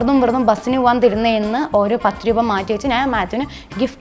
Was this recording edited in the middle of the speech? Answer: no; 0 cuts

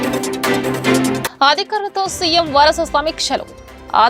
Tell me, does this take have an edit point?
yes; 1 cut; at 1.2 s

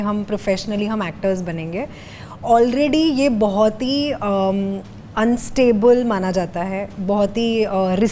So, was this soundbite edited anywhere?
no; 0 cuts

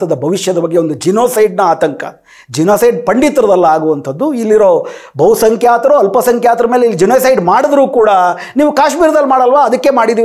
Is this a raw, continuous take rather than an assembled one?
yes; 0 cuts

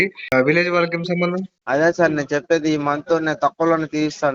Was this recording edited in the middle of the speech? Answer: yes; 1 cut; at 1.5 s

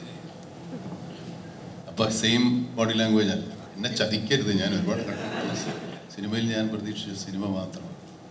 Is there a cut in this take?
yes; 2 cuts; at 3.6 s, 6.0 s

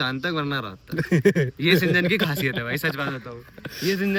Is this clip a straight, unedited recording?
yes; 0 cuts

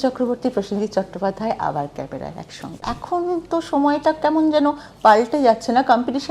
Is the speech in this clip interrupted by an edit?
yes; 1 cut; at 2.8 s

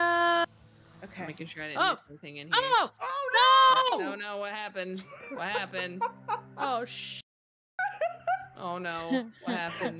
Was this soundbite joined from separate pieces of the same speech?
no; 0 cuts

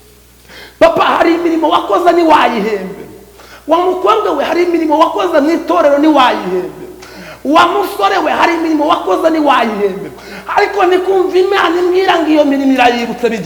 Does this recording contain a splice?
no; 0 cuts

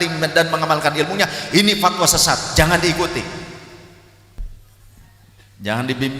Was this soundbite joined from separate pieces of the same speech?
yes; 1 cut; at 4.5 s

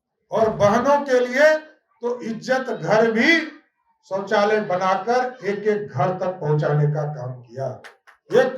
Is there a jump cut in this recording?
no; 0 cuts

